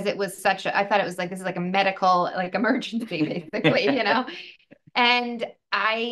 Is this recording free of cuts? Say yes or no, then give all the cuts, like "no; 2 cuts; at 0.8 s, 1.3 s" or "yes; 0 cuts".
yes; 0 cuts